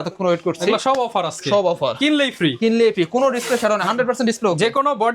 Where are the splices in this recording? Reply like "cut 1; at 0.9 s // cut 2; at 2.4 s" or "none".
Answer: none